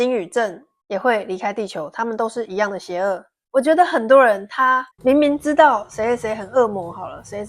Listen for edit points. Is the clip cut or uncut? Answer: cut